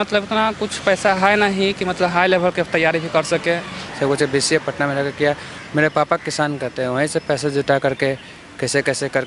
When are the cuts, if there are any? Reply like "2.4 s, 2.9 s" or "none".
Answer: 3.8 s

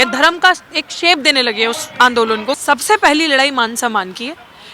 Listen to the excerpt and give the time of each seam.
2.6 s

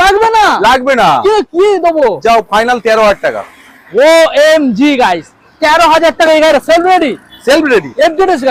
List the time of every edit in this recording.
none

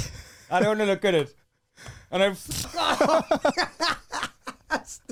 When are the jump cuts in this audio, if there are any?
none

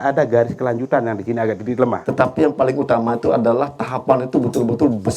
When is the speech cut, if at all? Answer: 2.0 s

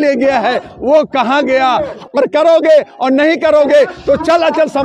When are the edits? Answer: 2.0 s

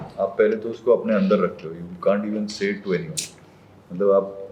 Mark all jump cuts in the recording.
none

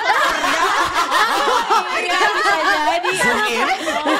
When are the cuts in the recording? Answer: none

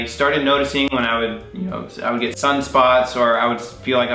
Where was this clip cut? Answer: none

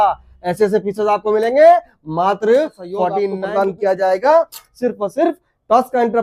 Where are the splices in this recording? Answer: 3.4 s

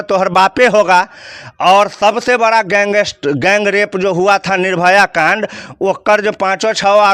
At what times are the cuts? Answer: none

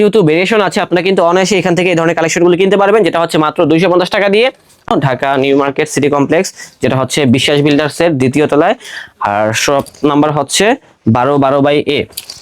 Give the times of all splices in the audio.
4.9 s

